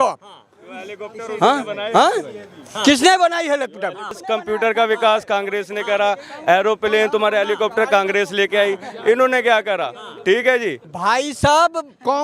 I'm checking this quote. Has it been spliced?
yes; 2 cuts; at 4.2 s, 10.8 s

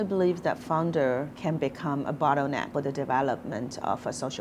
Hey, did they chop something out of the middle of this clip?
yes; 2 cuts; at 1.3 s, 2.7 s

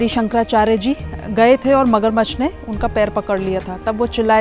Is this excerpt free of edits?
yes; 0 cuts

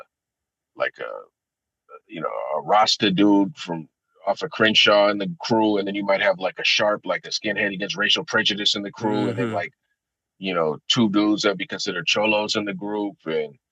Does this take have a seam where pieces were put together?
no; 0 cuts

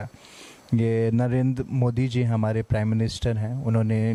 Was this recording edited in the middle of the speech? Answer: no; 0 cuts

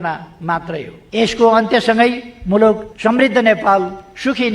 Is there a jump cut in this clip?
yes; 2 cuts; at 0.9 s, 2.9 s

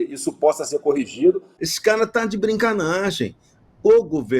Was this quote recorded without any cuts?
no; 1 cut; at 1.5 s

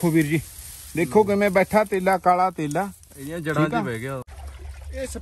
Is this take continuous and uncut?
no; 1 cut; at 4.2 s

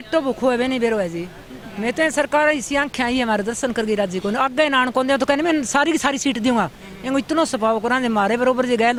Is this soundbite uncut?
yes; 0 cuts

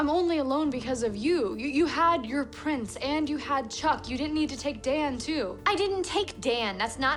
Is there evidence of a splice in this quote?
no; 0 cuts

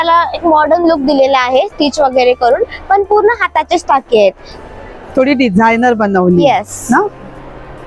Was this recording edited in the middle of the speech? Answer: no; 0 cuts

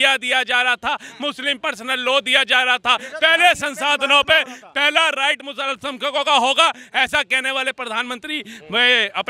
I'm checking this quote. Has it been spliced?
no; 0 cuts

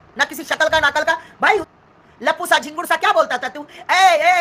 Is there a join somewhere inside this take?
yes; 1 cut; at 1.8 s

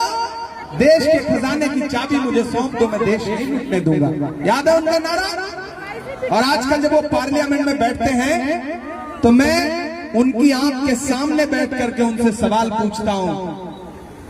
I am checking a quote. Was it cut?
no; 0 cuts

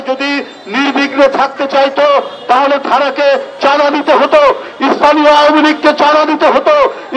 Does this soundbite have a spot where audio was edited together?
no; 0 cuts

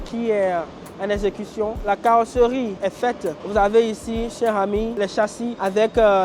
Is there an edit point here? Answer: no; 0 cuts

